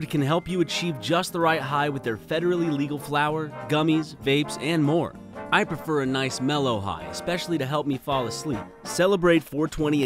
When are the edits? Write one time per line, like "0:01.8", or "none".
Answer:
0:05.3
0:08.7

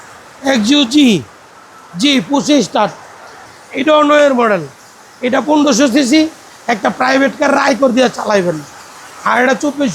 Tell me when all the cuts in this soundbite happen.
0:03.4

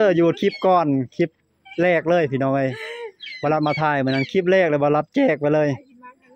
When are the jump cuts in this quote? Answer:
none

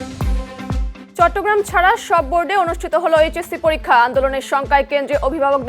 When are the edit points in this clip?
0:01.0

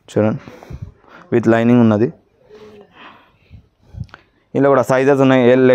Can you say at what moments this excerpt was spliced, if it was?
none

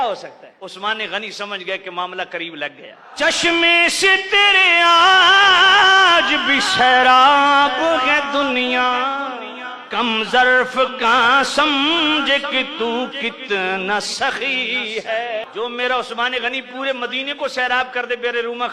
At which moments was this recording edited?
0:15.5

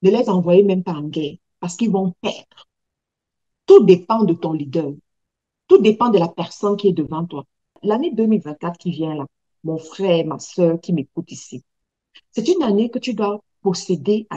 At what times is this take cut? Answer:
0:07.8

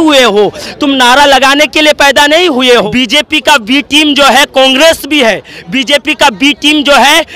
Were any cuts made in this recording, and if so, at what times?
0:02.9

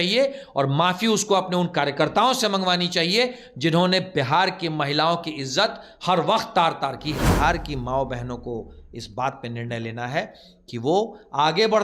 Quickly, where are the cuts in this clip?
0:07.3

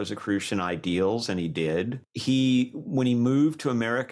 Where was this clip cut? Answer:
0:02.1

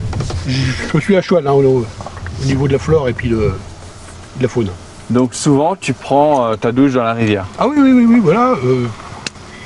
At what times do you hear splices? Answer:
none

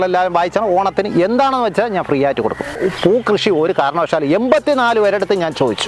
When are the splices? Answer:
0:02.7

